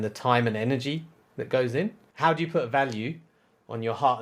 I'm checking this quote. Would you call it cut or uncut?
cut